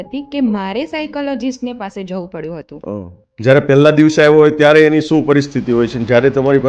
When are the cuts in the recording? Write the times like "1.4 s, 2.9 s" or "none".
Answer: 3.2 s